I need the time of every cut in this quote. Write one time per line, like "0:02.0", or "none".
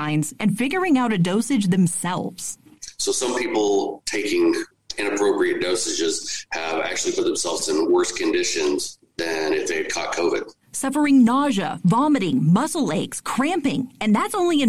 none